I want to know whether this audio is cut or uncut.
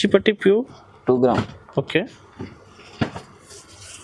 uncut